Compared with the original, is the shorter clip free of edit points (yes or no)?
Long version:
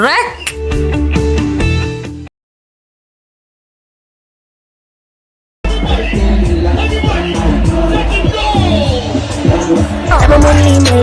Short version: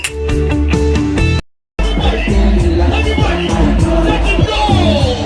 no